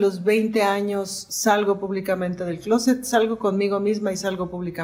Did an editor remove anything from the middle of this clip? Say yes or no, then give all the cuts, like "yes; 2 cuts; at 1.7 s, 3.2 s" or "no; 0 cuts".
no; 0 cuts